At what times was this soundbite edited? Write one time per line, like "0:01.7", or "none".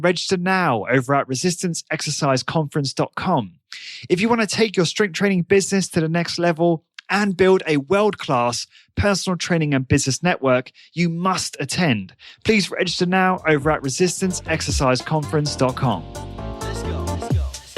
0:16.2